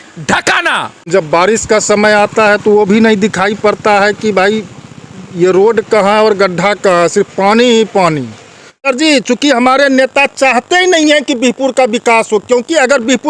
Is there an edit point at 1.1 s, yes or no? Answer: yes